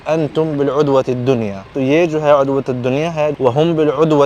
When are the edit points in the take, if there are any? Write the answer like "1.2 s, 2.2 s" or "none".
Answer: 1.8 s, 3.3 s